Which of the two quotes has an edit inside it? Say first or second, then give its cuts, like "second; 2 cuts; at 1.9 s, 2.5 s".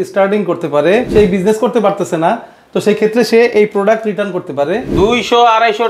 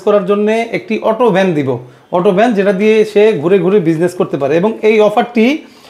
first; 2 cuts; at 1.1 s, 4.9 s